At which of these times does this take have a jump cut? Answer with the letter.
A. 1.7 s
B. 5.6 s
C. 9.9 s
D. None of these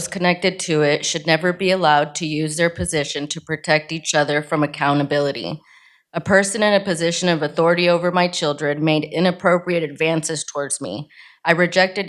D